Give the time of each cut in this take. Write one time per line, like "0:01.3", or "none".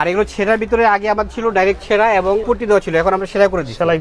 0:02.4